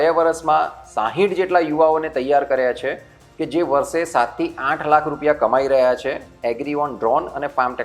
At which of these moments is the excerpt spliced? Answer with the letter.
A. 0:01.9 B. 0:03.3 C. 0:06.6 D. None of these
D